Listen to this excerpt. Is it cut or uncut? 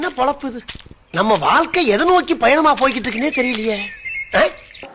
uncut